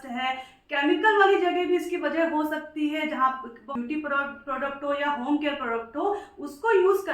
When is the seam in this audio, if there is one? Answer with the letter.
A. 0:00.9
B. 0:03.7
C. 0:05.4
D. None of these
B